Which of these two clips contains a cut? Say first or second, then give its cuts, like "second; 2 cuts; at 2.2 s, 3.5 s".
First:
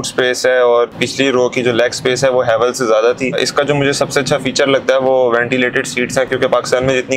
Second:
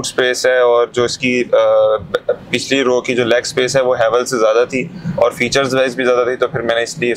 first; 2 cuts; at 0.9 s, 3.4 s